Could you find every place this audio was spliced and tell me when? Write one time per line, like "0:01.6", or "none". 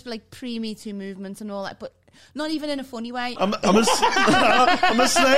0:03.3